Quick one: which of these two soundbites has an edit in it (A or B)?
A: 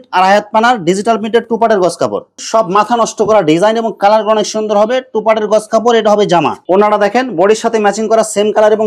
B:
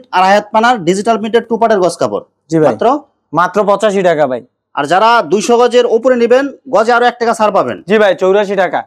A